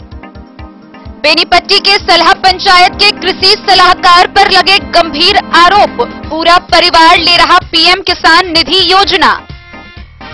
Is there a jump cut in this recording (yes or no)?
no